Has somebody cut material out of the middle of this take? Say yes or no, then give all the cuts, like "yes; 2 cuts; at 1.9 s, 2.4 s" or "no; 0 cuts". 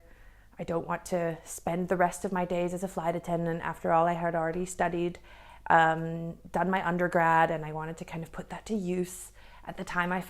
no; 0 cuts